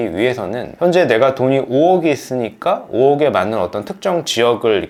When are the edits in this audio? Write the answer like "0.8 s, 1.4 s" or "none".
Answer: none